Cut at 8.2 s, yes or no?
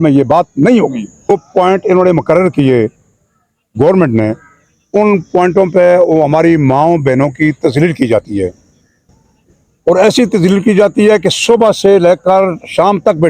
no